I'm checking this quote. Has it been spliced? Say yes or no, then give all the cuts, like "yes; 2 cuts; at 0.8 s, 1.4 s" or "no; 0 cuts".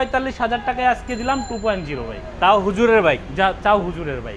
no; 0 cuts